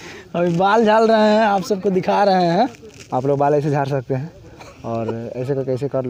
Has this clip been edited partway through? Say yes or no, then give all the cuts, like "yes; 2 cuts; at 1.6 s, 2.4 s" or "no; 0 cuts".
no; 0 cuts